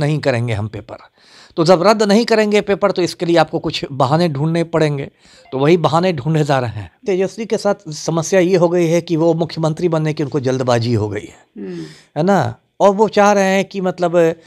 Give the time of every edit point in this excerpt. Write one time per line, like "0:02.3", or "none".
0:07.0